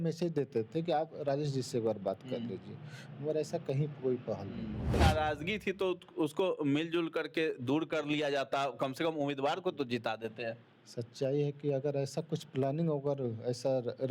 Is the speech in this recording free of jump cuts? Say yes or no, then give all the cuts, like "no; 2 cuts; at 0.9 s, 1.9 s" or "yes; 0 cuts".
no; 1 cut; at 4.9 s